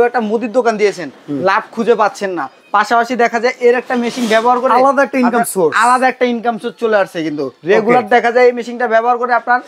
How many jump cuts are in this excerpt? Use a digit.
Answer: 0